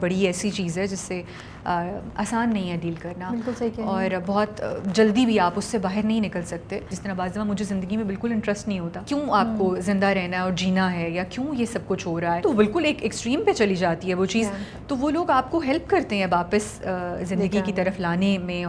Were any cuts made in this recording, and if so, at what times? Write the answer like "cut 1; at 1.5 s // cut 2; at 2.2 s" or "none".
cut 1; at 6.9 s // cut 2; at 9.0 s // cut 3; at 12.4 s